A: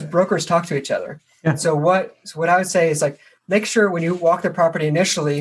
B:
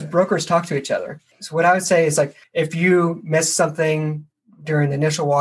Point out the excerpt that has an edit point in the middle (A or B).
B